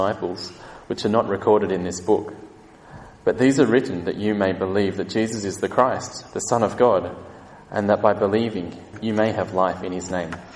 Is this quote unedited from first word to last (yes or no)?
no